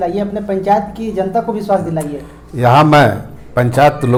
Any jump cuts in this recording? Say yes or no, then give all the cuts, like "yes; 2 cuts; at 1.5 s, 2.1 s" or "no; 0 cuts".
no; 0 cuts